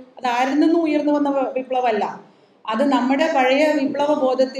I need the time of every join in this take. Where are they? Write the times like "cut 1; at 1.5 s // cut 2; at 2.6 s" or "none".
none